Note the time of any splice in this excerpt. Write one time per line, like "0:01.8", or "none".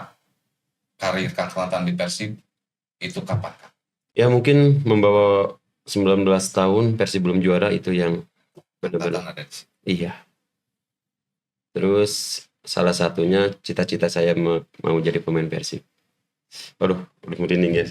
0:04.2